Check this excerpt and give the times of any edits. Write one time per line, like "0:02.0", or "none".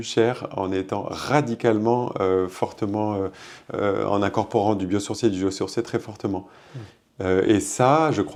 none